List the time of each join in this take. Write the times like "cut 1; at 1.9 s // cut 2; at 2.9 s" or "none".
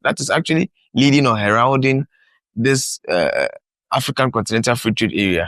none